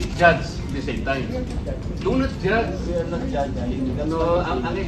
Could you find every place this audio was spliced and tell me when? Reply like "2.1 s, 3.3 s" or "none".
none